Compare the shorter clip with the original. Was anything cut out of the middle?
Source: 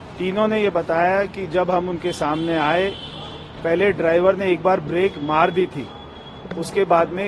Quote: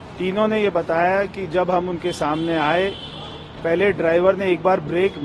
no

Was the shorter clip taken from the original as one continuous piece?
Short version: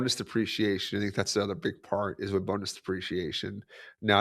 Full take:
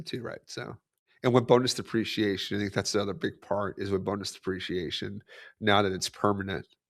yes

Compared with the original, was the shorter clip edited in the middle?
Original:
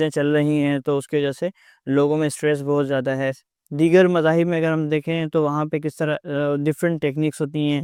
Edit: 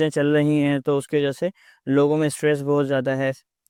no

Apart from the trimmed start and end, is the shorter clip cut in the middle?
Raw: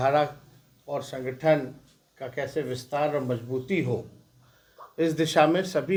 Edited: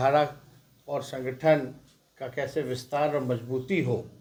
no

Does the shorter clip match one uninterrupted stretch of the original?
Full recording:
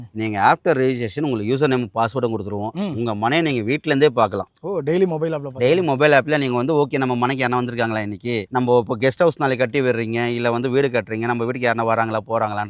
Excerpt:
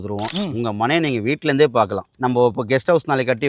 no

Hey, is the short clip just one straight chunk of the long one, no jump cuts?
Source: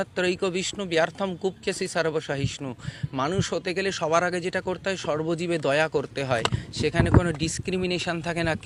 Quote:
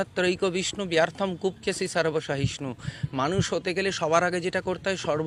yes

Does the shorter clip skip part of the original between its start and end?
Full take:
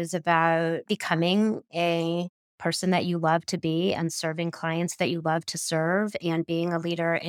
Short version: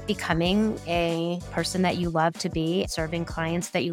yes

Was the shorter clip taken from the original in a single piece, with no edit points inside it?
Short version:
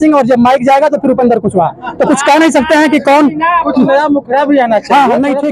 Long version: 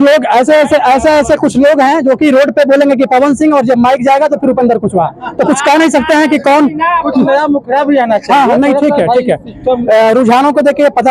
yes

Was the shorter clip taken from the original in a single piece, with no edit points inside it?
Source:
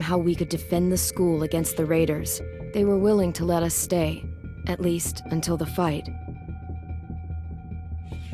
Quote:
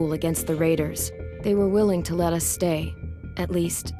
yes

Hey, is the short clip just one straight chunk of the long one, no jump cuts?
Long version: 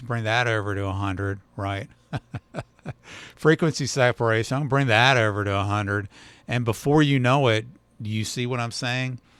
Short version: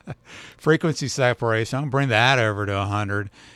yes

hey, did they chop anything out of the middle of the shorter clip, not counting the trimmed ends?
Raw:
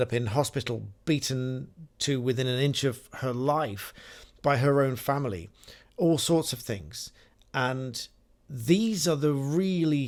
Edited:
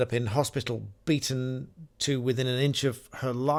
no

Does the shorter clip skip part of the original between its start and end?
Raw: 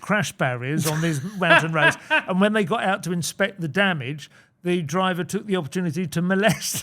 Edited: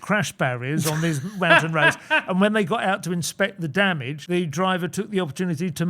yes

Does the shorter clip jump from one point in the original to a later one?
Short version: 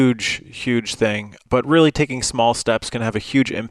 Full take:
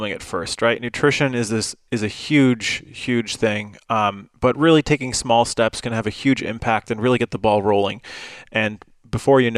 yes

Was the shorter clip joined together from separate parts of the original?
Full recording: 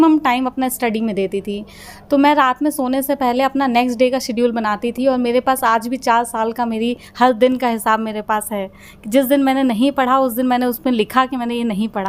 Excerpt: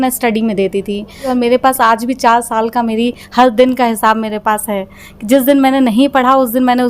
yes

